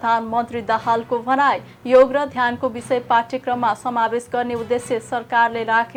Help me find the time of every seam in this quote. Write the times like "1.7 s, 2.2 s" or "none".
none

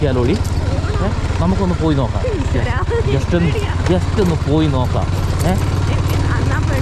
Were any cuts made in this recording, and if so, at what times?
none

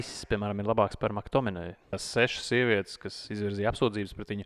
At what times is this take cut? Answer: 2.0 s

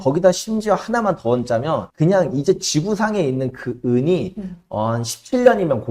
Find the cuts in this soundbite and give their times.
none

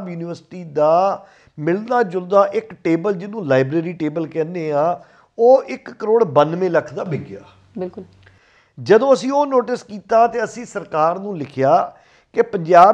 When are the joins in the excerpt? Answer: none

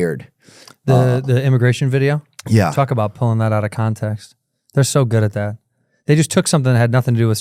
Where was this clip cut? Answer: none

